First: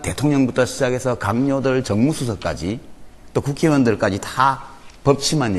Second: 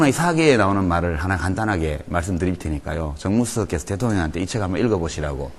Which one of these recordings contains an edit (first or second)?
second